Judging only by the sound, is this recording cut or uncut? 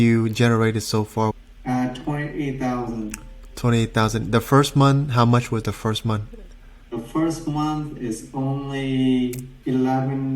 cut